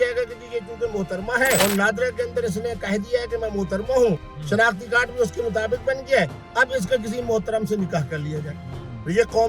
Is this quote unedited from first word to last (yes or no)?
no